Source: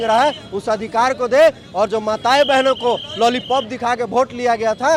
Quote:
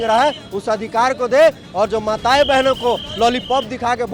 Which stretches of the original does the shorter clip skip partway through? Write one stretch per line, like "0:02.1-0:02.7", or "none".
none